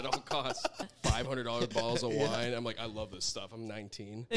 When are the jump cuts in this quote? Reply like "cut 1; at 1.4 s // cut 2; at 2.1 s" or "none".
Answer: cut 1; at 0.9 s